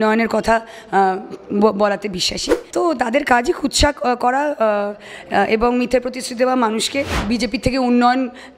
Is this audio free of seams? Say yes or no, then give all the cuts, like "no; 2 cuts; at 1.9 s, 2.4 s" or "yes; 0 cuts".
no; 2 cuts; at 2.6 s, 7.2 s